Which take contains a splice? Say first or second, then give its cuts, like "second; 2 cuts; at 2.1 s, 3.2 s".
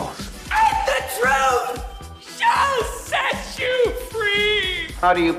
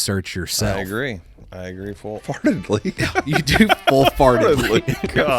second; 1 cut; at 2.2 s